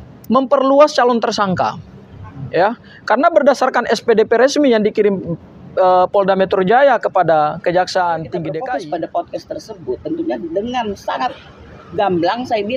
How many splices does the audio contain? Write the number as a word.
one